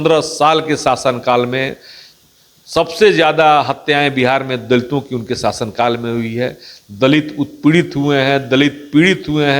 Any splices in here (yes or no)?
no